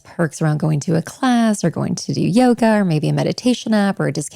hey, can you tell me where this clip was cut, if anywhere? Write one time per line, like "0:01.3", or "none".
none